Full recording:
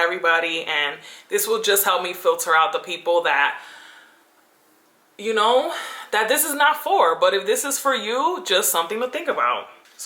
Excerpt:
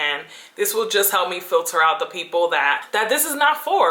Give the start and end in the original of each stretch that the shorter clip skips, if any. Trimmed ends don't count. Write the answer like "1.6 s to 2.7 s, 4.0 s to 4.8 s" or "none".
3.6 s to 6.0 s

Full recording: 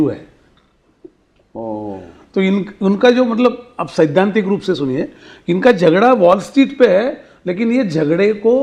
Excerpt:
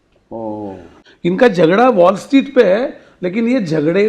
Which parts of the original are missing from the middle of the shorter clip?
2.2 s to 5.2 s

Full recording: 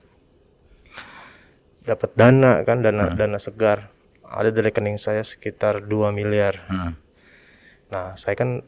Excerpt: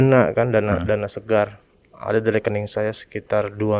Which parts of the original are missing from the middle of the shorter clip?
none

